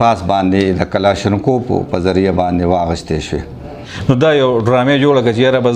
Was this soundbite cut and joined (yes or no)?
yes